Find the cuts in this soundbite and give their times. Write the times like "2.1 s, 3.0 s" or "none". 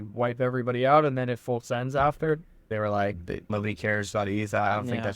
2.7 s, 3.5 s